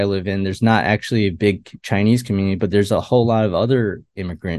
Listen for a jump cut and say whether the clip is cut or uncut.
uncut